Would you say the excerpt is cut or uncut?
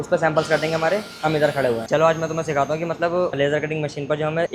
uncut